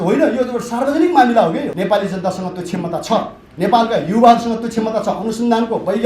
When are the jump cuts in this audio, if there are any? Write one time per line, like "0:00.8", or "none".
0:01.7